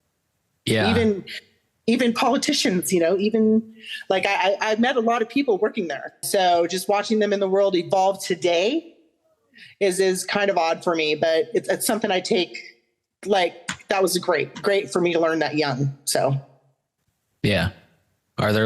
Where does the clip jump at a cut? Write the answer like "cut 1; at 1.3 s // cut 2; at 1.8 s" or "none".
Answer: cut 1; at 6.2 s